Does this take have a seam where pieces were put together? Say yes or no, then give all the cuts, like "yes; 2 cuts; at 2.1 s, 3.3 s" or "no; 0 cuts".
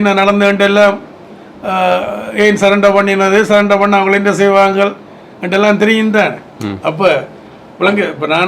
no; 0 cuts